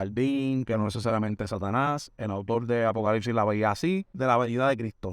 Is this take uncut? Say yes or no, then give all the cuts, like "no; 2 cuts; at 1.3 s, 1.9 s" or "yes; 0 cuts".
no; 1 cut; at 4.1 s